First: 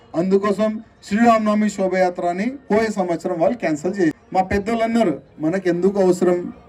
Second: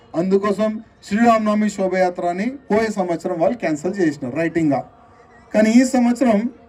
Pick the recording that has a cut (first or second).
first